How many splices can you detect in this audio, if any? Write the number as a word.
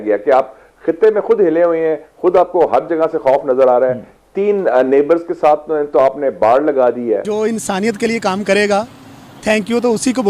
one